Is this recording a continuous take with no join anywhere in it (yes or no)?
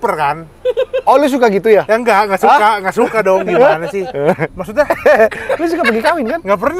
no